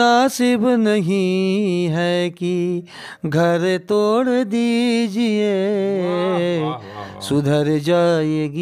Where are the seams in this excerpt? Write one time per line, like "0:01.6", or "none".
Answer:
none